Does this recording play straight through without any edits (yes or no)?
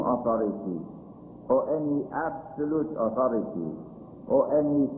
yes